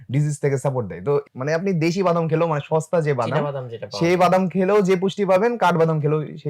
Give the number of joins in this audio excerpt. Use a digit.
1